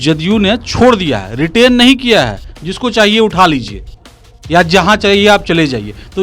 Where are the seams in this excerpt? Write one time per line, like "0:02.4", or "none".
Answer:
none